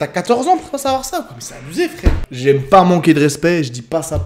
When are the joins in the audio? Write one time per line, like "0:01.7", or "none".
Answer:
0:02.3